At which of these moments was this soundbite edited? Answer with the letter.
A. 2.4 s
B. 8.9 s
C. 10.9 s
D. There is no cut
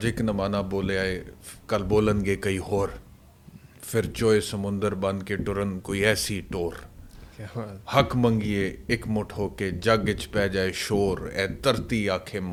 D